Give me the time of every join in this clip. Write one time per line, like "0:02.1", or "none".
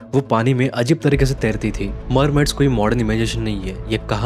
0:01.8